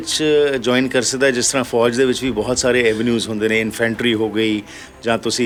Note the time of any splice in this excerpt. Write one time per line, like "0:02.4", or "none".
none